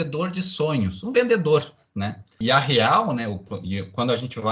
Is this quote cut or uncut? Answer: cut